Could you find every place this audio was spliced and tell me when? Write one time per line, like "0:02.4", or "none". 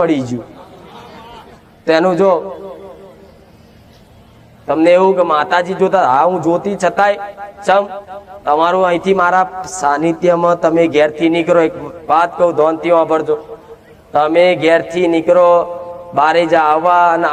none